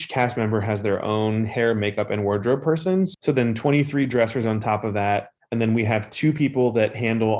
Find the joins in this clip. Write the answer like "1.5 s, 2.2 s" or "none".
3.1 s, 5.4 s

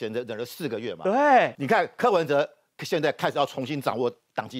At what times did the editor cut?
1.6 s

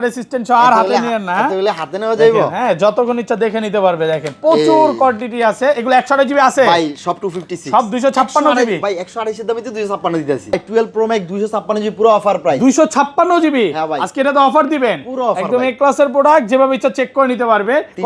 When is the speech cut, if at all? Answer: 10.5 s

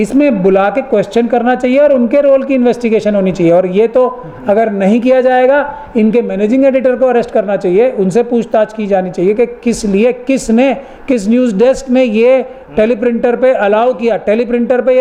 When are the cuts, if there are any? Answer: none

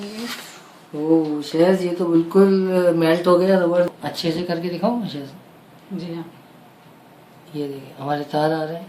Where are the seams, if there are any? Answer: 3.9 s

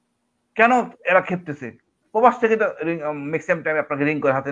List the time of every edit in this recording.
none

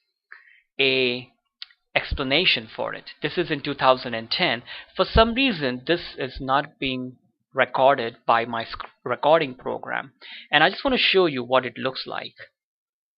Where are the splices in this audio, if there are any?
3.6 s

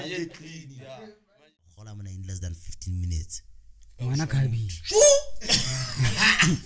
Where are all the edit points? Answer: 1.1 s

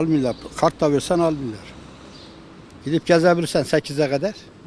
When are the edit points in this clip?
none

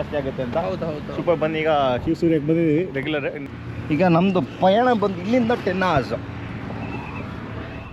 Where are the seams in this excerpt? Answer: none

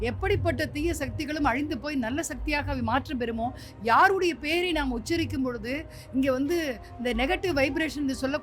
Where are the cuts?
none

